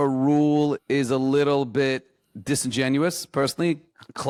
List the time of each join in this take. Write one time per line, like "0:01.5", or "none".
none